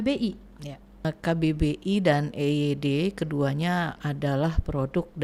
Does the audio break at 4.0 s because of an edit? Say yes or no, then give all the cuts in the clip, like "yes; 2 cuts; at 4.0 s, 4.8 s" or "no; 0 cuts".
no; 1 cut; at 1.0 s